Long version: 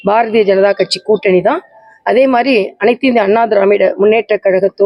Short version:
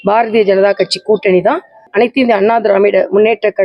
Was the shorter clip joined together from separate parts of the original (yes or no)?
yes